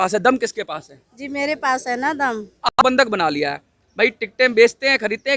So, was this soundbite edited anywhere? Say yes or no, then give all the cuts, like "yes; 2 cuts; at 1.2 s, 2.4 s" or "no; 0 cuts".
yes; 1 cut; at 2.7 s